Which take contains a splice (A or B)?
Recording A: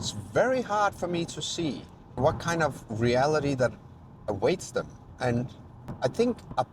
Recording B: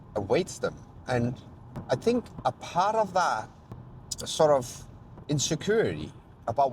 B